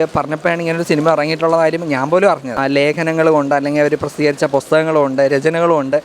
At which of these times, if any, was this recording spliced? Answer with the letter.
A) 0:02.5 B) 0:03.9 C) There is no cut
A